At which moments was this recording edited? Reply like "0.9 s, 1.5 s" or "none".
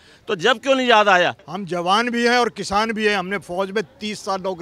1.5 s